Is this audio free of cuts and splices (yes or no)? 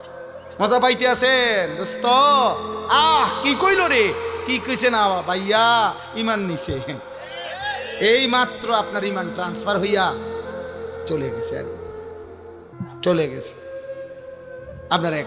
yes